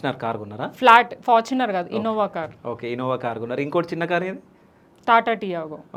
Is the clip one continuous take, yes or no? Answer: yes